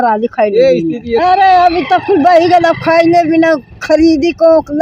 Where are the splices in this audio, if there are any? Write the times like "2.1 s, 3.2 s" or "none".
1.2 s